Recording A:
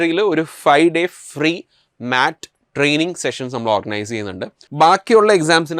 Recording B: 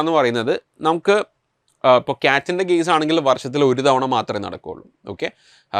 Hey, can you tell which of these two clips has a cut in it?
A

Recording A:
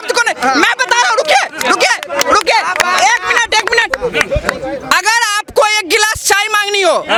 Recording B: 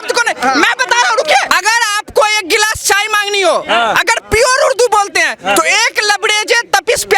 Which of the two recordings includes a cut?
B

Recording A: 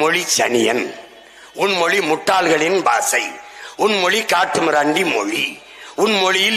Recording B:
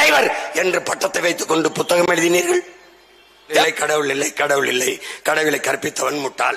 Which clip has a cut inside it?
B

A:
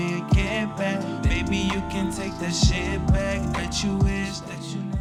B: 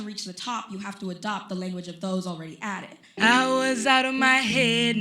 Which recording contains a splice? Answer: B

